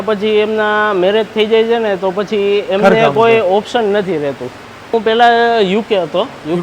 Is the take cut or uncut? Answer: cut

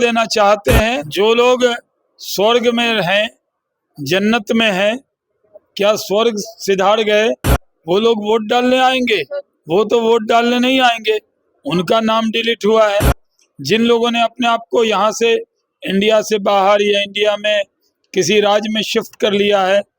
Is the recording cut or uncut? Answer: cut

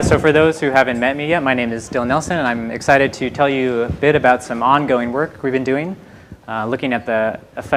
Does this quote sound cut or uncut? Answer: uncut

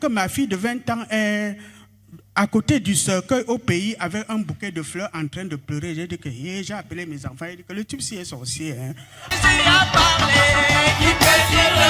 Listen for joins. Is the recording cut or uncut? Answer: cut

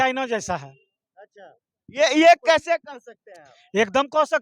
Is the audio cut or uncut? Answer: uncut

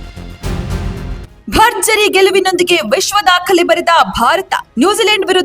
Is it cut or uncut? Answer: cut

